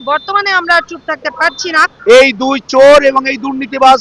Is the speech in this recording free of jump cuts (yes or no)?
no